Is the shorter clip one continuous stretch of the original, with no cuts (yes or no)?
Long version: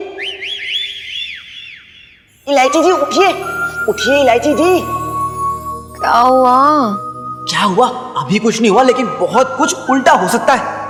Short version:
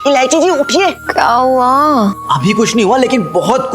no